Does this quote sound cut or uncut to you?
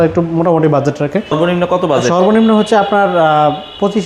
cut